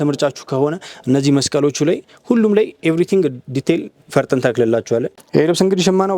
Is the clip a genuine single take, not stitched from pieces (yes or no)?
no